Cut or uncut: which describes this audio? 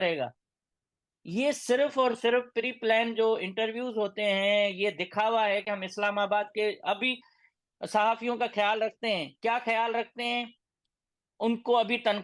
uncut